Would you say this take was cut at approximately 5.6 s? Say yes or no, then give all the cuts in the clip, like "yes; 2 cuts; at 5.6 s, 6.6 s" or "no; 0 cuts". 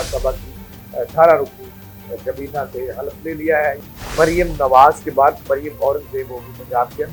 no; 1 cut; at 3.9 s